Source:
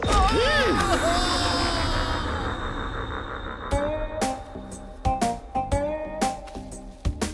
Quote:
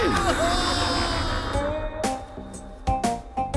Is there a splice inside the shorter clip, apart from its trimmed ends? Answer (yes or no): yes